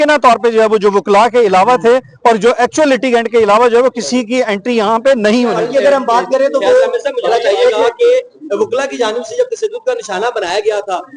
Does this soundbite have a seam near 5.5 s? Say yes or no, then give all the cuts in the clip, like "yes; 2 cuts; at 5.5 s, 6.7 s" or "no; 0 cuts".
yes; 1 cut; at 5.5 s